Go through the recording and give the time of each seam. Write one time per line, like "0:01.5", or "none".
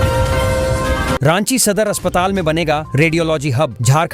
0:01.2